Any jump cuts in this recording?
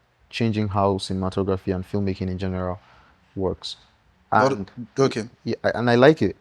no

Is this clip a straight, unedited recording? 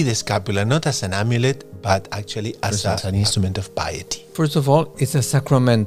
no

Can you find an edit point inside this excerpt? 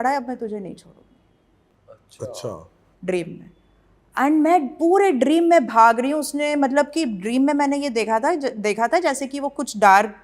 no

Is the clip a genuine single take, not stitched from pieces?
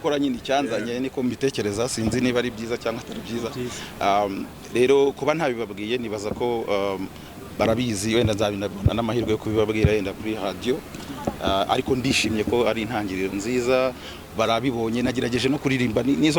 yes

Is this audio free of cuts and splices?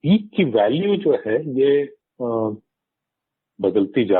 yes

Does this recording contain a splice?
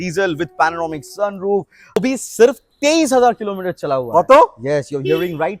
yes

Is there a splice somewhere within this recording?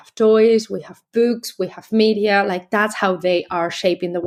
no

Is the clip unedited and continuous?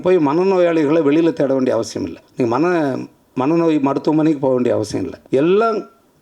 no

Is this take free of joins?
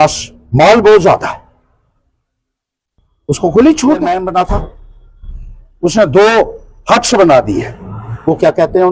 no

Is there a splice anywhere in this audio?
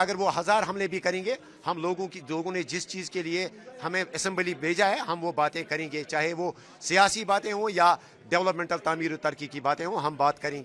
no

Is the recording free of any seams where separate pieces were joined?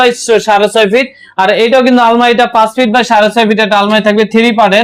yes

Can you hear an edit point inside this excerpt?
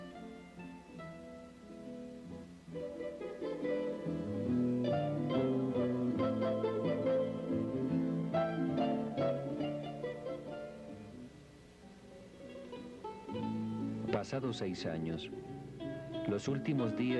yes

